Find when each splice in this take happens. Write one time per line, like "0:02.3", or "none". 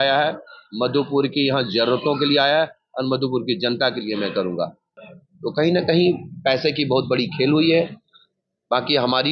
0:04.9